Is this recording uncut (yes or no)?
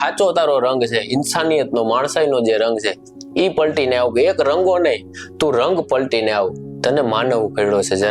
yes